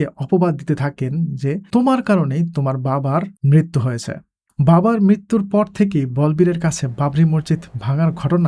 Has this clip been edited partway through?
yes; 2 cuts; at 1.6 s, 3.3 s

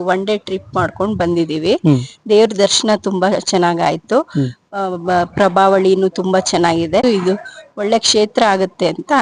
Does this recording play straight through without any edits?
no; 1 cut; at 7.0 s

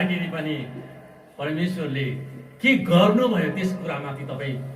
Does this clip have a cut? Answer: no; 0 cuts

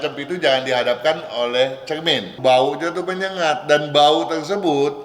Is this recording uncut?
no; 1 cut; at 2.4 s

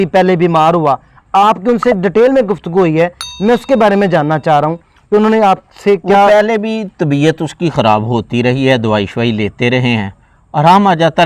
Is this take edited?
no; 0 cuts

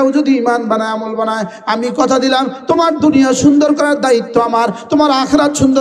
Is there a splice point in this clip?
no; 0 cuts

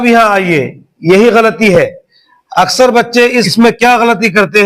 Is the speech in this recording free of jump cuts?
no; 2 cuts; at 2.4 s, 3.5 s

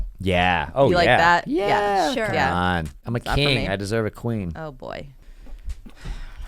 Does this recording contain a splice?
yes; 2 cuts; at 3.0 s, 5.2 s

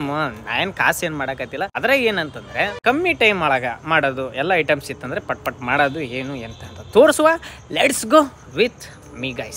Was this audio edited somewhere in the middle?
no; 0 cuts

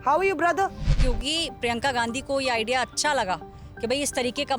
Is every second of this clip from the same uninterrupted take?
no; 1 cut; at 0.9 s

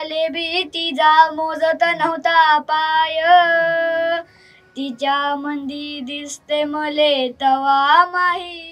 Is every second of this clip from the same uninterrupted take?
yes; 0 cuts

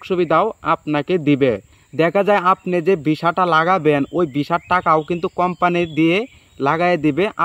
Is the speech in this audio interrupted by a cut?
no; 0 cuts

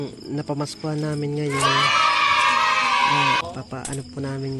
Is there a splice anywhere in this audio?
yes; 1 cut; at 3.4 s

